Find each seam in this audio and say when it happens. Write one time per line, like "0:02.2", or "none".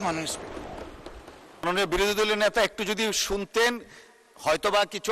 0:01.6